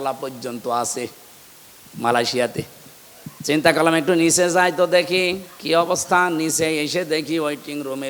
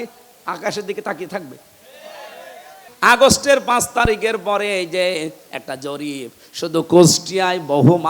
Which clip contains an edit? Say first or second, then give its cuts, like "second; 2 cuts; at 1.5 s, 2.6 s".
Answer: second; 2 cuts; at 2.8 s, 5.5 s